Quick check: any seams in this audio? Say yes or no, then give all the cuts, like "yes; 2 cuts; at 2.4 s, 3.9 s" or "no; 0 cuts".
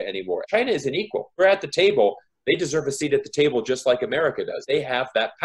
no; 0 cuts